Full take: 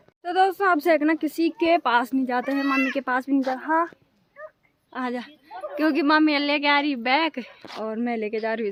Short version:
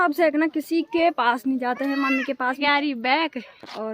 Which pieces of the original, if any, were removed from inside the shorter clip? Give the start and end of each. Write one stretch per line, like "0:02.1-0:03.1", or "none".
0:03.3-0:06.6